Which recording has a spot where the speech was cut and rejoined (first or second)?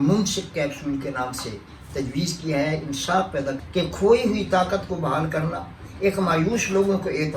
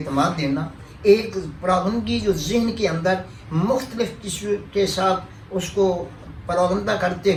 first